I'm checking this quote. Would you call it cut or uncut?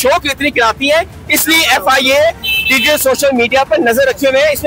uncut